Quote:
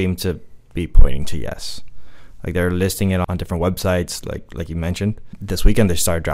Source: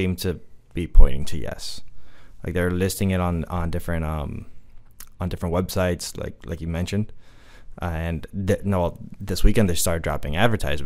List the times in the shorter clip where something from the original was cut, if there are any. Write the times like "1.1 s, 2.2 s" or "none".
3.3 s, 5.3 s